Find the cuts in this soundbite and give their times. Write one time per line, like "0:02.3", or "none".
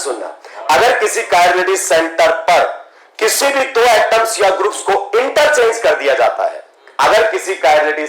none

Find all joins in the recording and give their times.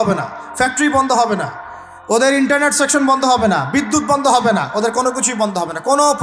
none

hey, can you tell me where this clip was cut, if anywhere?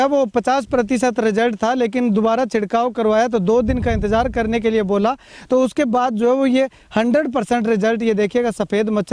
none

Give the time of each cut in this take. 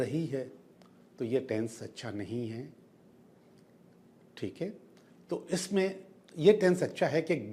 none

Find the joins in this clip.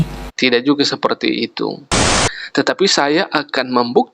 0:01.9

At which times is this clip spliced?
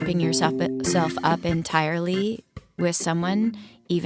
none

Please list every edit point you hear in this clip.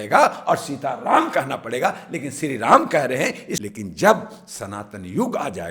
0:03.5

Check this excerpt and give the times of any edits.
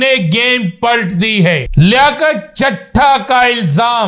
0:01.7

